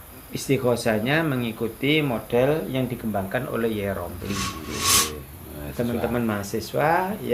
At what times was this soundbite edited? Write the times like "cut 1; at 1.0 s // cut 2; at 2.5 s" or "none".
cut 1; at 4.8 s